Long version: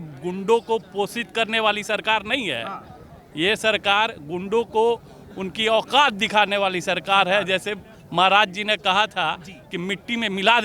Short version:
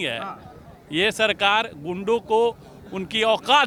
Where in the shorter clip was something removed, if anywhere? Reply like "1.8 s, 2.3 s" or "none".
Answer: none

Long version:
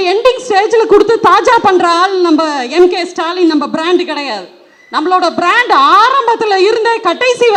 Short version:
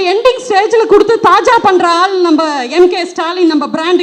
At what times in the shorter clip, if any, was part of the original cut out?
none

